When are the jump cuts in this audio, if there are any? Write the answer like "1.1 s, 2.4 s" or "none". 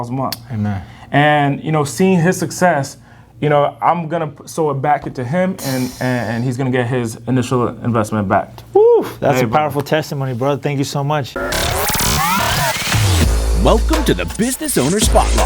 11.3 s